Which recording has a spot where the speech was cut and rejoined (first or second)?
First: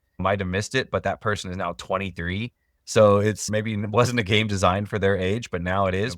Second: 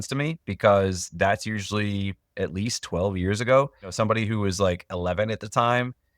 second